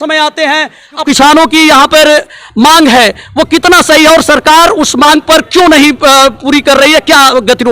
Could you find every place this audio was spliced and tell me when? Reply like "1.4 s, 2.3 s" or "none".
1.0 s

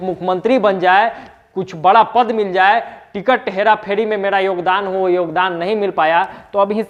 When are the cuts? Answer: none

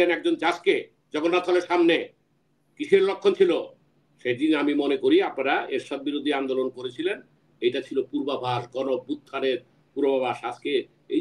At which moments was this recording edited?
none

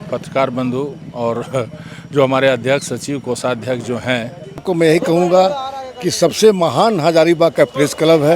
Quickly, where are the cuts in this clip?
4.6 s

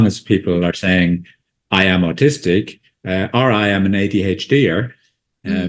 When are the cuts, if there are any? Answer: 3.0 s

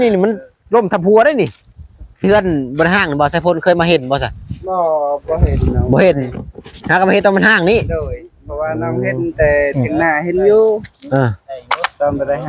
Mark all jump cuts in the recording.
2.2 s

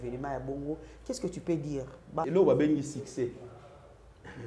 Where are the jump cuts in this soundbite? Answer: 2.2 s

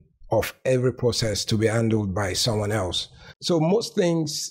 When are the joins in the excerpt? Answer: 3.4 s

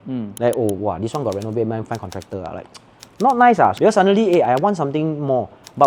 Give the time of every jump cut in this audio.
1.8 s, 3.7 s

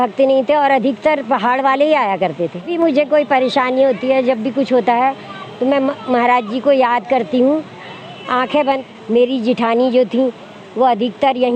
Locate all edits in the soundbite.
2.7 s, 8.8 s

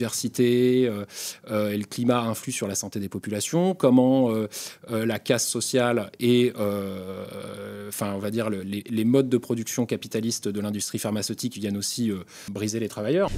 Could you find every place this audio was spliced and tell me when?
12.4 s

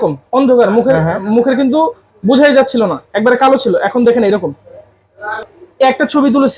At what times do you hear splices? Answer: 5.5 s

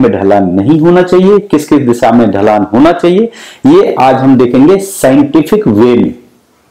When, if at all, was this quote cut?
none

